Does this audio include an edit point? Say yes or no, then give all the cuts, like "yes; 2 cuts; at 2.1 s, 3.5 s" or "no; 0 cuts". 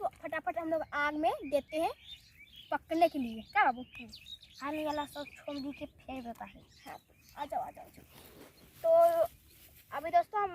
yes; 1 cut; at 8.7 s